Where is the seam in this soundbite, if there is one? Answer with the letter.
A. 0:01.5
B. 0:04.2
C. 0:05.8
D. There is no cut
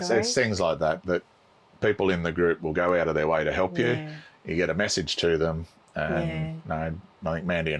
D